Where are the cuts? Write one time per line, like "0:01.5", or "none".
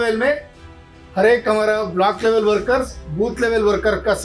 none